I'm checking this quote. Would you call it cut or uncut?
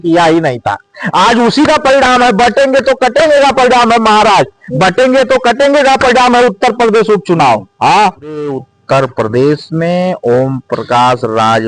cut